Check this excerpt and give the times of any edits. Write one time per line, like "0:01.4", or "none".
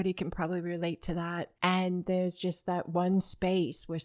0:01.5